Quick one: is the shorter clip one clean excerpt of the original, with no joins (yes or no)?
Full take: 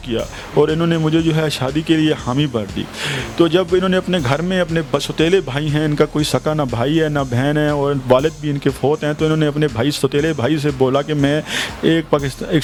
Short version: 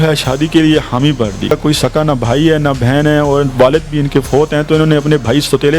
no